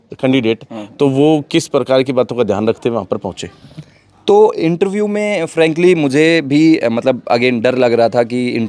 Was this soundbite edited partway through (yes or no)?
no